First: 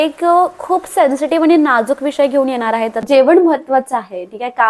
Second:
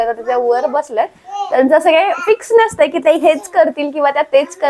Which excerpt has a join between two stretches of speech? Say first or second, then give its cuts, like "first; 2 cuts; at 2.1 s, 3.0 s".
first; 1 cut; at 3.0 s